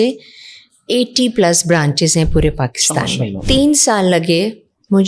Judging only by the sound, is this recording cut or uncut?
cut